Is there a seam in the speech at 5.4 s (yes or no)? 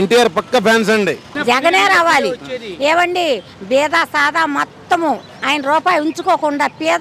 no